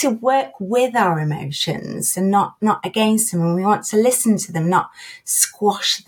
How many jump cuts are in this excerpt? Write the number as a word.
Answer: zero